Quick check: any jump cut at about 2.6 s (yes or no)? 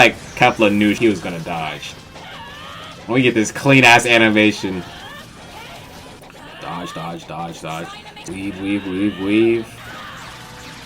no